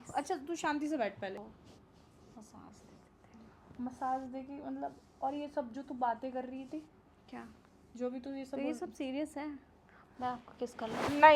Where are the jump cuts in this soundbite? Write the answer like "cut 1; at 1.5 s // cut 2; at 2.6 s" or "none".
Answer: cut 1; at 1.5 s